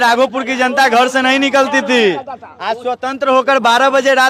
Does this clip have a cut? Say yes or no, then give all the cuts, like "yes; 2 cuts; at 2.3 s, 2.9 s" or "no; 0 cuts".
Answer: no; 0 cuts